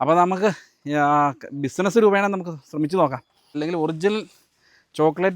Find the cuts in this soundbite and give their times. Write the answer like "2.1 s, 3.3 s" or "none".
3.6 s